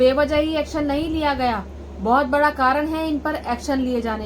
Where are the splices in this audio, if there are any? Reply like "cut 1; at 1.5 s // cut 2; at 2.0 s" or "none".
none